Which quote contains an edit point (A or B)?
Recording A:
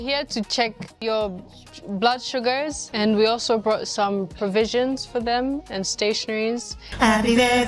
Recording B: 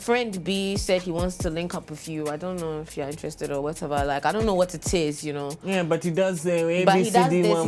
A